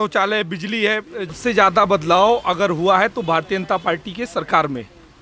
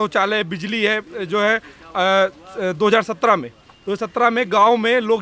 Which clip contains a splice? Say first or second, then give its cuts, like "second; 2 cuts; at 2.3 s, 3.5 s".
first; 1 cut; at 1.3 s